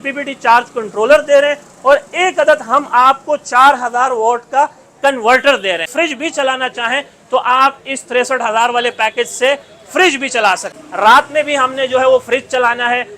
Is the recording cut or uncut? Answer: cut